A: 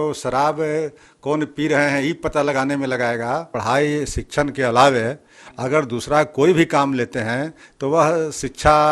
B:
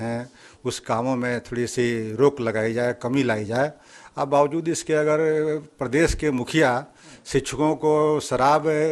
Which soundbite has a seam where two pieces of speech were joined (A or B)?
A